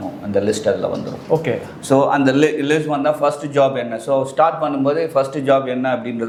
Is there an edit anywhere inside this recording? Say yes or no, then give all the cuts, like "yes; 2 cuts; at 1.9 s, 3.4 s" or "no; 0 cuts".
no; 0 cuts